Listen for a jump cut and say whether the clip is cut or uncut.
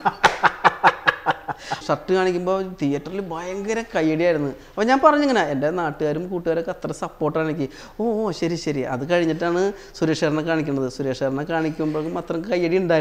cut